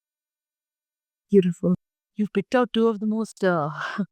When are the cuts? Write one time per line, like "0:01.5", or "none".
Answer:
0:02.0

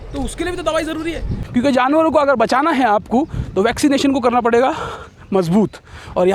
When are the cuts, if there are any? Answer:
0:01.3

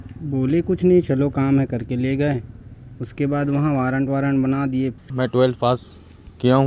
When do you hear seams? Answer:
0:05.1

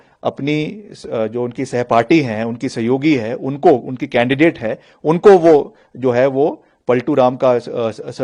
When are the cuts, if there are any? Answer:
none

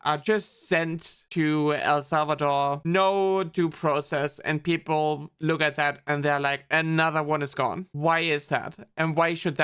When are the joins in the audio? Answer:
none

